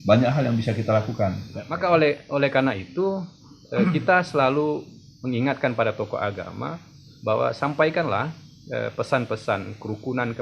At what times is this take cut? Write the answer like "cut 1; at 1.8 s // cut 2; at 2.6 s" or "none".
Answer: cut 1; at 1.7 s